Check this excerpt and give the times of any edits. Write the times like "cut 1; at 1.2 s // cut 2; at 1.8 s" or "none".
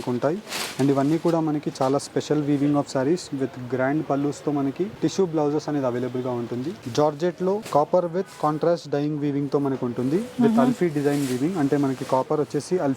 cut 1; at 4.9 s // cut 2; at 6.8 s // cut 3; at 7.6 s